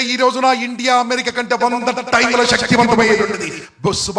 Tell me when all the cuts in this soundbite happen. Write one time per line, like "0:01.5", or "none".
none